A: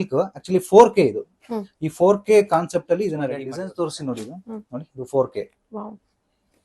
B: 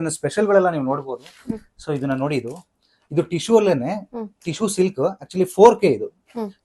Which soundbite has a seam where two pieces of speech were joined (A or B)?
A